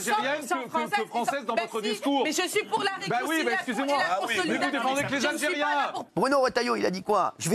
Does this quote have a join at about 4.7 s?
no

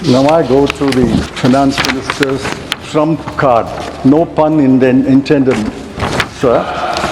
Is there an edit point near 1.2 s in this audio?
yes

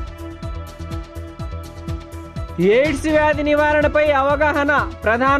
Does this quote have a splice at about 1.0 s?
no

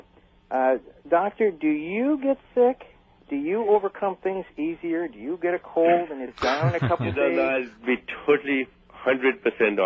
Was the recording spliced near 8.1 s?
no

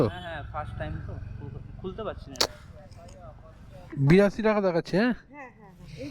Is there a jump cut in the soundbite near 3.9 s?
yes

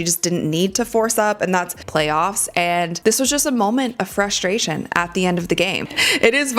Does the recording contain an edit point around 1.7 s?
yes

